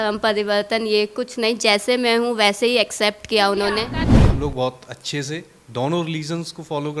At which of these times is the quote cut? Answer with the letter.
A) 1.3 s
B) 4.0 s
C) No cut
B